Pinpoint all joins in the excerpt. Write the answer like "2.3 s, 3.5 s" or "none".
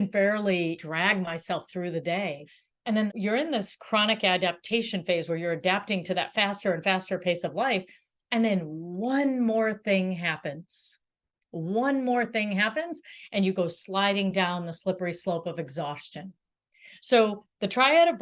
0.8 s, 2.7 s